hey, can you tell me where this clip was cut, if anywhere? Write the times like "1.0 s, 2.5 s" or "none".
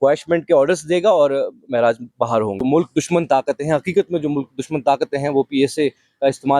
2.5 s